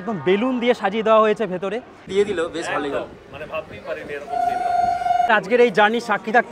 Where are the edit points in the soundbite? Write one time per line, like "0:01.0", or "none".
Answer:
0:02.1
0:05.3